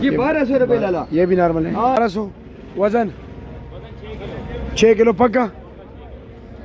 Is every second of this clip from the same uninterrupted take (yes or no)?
no